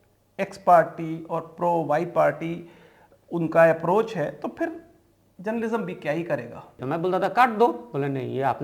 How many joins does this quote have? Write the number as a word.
one